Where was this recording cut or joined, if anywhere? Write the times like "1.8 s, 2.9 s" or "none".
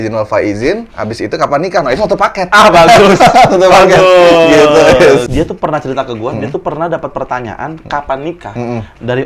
5.3 s

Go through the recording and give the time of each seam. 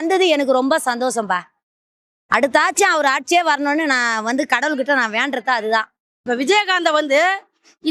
6.2 s

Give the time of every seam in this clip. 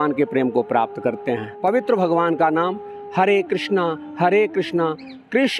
1.5 s

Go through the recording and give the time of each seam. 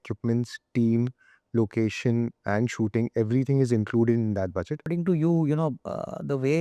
4.9 s

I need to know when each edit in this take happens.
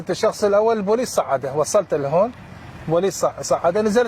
none

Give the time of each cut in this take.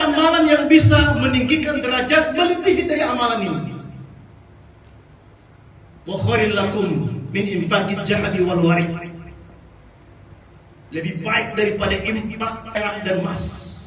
12.8 s

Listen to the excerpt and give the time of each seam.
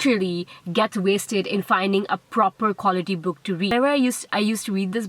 3.7 s

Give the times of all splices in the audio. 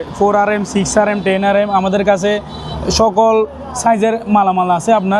none

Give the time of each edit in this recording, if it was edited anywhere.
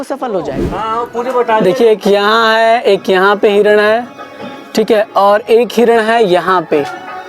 1.0 s

